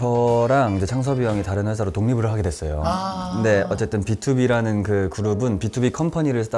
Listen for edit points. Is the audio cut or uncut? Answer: uncut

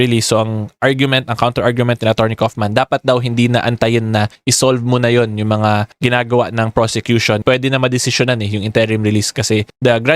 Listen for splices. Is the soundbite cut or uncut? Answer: cut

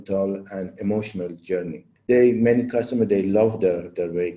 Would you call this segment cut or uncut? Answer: cut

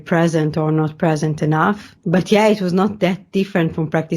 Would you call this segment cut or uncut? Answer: cut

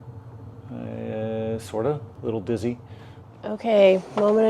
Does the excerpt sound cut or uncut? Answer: cut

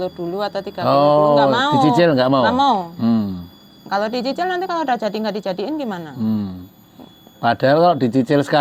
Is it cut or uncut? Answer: uncut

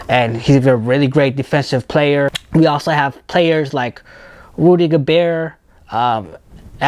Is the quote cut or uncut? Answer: cut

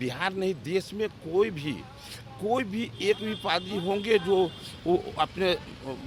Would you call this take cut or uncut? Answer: uncut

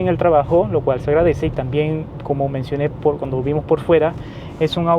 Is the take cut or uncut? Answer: uncut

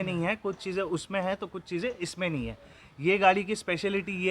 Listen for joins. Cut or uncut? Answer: uncut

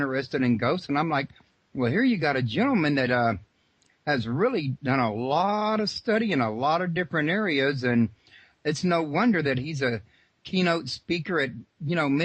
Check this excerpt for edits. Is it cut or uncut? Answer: uncut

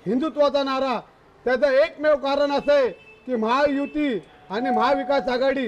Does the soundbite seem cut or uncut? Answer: uncut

